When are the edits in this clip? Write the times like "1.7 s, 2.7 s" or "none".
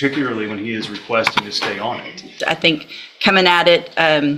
2.3 s